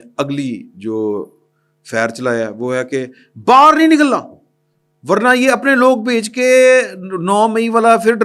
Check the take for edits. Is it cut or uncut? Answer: uncut